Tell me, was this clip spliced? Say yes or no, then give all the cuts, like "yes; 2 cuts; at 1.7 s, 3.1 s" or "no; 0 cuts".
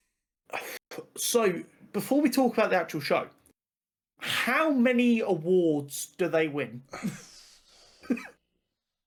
no; 0 cuts